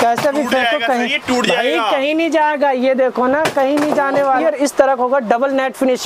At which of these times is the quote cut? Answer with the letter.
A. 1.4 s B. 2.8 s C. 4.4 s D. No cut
C